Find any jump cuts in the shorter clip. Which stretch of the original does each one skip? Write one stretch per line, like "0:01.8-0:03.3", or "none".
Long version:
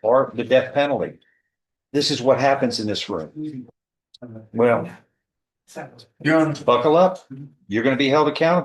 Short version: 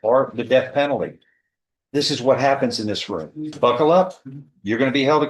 0:03.5-0:06.6